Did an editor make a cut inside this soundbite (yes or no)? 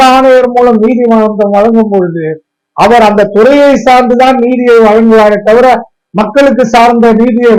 no